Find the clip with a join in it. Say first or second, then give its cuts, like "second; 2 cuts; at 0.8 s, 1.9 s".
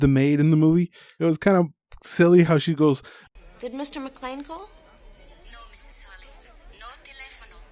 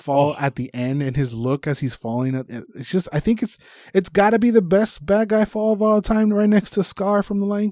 first; 1 cut; at 1.0 s